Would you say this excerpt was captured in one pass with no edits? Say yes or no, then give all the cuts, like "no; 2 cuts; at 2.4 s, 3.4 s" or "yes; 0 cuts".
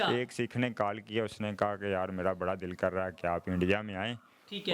yes; 0 cuts